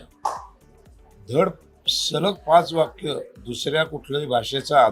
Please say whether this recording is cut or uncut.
uncut